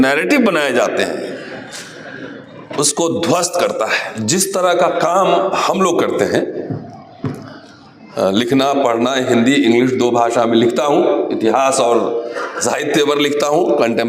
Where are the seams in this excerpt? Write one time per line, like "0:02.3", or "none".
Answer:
0:04.1

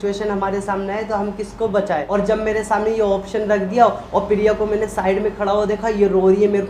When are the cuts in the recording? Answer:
none

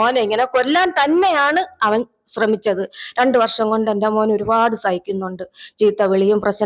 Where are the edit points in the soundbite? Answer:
none

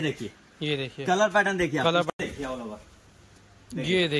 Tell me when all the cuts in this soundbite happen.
0:02.2

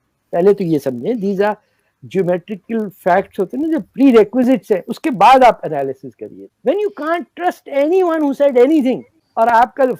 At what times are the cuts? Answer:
none

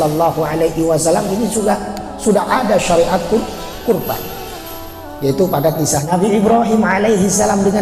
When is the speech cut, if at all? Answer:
0:06.0

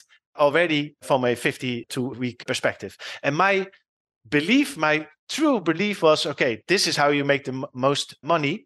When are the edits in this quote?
none

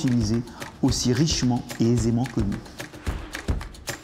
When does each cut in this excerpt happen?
0:02.8

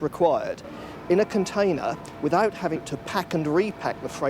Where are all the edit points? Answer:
0:02.8

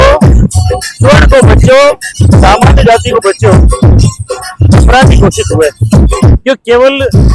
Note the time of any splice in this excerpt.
none

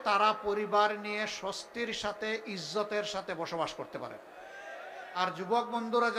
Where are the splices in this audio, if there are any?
0:05.2

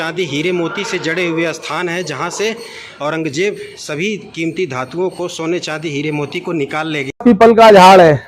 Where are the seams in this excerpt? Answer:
0:07.2

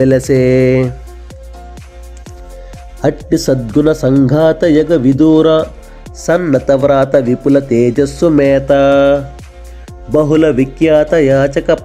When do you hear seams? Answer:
0:01.0
0:03.0

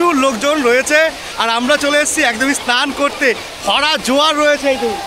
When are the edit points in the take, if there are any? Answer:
none

